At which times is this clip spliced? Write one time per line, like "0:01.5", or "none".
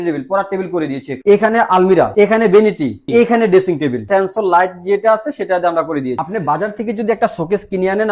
0:01.1
0:02.1
0:03.0
0:04.0
0:06.2